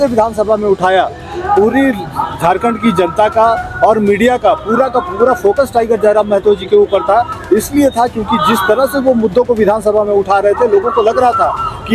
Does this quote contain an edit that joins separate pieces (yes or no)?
no